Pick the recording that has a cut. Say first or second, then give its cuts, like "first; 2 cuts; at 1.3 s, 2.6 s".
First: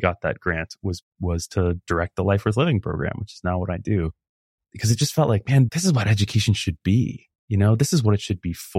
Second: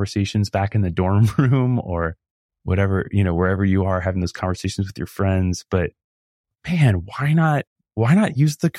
first; 2 cuts; at 4.6 s, 5.7 s